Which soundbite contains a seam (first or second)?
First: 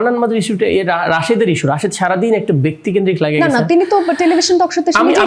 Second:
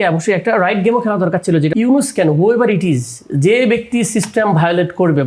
second